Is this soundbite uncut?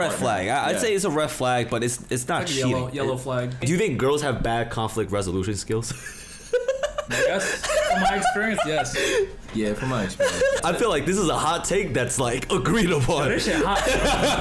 no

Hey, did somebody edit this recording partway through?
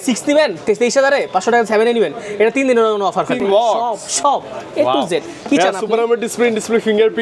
yes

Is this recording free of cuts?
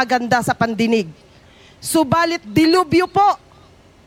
yes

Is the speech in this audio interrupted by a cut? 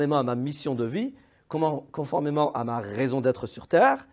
no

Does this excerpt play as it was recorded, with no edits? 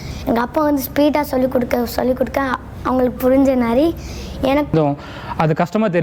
no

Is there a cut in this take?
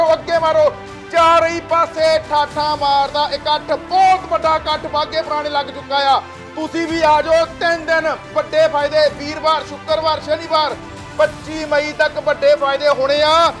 no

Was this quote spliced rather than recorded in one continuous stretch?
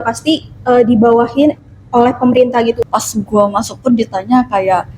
yes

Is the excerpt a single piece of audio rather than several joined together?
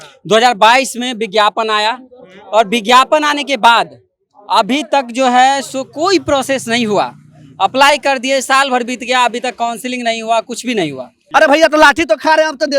no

